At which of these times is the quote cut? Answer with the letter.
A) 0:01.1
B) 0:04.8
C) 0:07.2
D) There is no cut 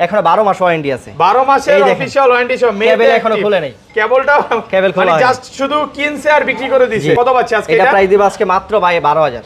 C